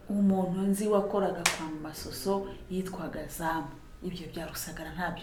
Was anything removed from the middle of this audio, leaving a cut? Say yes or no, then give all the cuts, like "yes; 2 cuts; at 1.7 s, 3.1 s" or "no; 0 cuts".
no; 0 cuts